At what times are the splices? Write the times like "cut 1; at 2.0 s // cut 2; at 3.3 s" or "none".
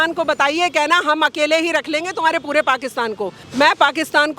cut 1; at 3.4 s